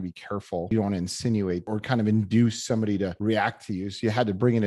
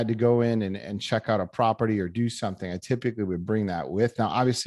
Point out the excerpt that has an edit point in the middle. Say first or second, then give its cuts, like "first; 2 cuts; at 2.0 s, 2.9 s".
first; 3 cuts; at 0.7 s, 1.7 s, 3.2 s